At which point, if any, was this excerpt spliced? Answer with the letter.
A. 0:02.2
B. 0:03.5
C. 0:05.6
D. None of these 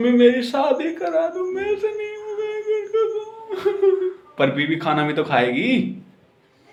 D